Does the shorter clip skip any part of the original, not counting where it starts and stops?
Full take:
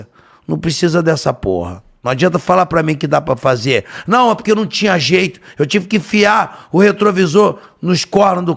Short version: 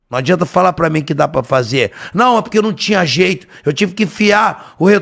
no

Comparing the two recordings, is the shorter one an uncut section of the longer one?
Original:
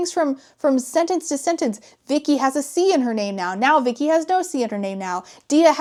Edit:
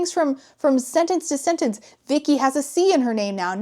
yes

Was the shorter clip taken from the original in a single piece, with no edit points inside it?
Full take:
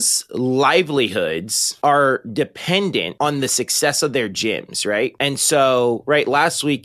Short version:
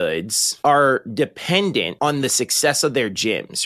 yes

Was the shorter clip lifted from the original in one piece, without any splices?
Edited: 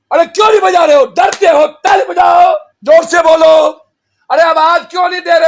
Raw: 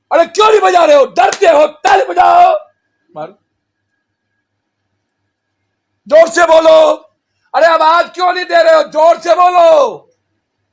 no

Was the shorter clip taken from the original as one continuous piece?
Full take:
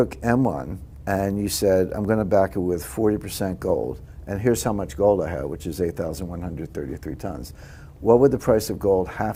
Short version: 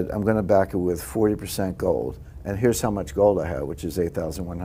yes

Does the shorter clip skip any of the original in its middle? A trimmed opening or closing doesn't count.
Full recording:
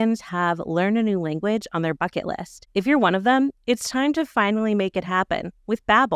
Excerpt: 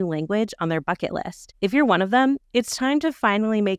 no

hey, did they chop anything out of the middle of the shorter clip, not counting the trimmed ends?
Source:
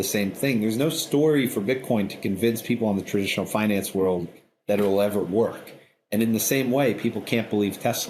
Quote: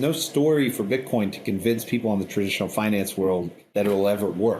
yes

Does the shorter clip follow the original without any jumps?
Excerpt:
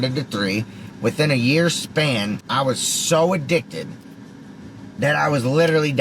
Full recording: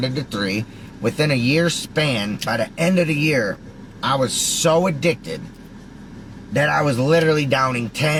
no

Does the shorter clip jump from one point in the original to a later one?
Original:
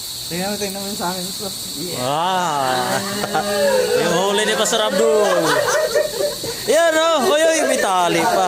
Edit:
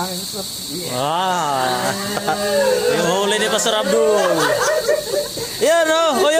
no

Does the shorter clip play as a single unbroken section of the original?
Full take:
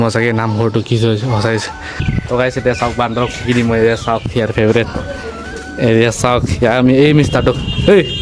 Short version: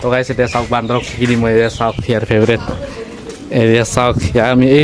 yes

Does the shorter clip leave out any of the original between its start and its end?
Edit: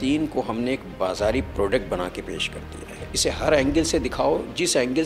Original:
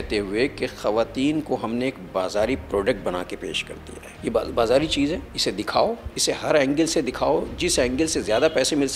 yes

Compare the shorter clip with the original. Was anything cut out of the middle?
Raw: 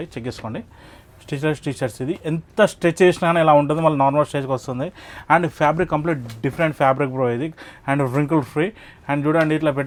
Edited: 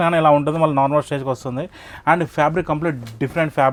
no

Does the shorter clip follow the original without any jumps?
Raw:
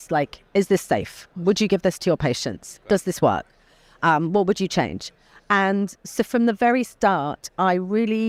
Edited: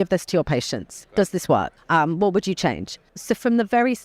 no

